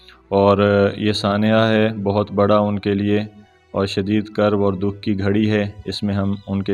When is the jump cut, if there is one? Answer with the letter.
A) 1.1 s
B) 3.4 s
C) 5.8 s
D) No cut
D